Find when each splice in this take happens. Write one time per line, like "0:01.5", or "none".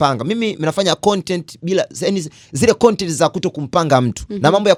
none